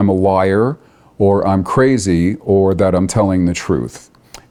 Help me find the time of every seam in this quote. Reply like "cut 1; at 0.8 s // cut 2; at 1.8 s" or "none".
none